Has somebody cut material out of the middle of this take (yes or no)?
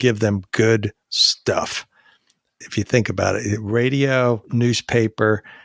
no